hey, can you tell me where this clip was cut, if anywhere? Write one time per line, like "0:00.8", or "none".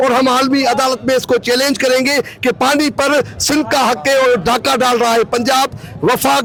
none